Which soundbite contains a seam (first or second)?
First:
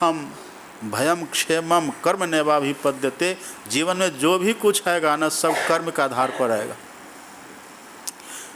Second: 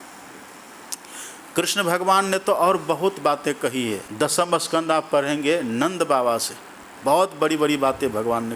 second